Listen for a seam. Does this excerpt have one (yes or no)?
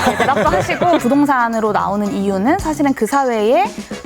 yes